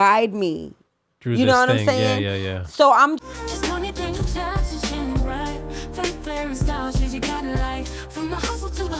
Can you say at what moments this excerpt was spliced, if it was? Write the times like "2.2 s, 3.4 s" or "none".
3.2 s